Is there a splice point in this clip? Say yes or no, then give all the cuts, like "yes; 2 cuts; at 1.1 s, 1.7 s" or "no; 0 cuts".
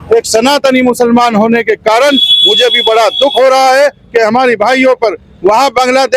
no; 0 cuts